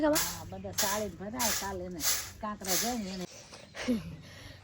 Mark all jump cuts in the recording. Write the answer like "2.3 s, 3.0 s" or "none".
3.3 s